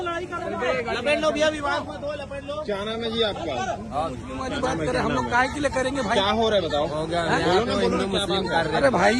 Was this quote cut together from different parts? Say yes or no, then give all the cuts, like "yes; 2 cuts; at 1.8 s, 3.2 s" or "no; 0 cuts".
no; 0 cuts